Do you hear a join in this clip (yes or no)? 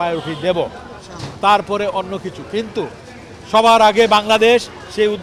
no